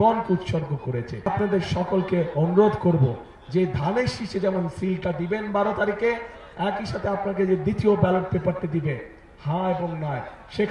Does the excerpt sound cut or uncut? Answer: cut